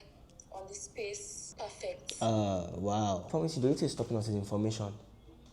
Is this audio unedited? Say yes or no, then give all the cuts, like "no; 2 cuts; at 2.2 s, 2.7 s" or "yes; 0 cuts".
no; 1 cut; at 3.3 s